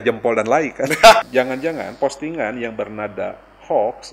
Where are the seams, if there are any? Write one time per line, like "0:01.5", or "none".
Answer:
0:01.2